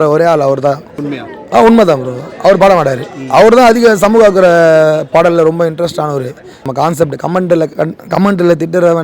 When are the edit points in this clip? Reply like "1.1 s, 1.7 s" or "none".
1.1 s, 6.6 s